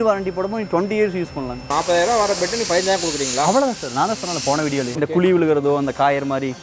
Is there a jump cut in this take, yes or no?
yes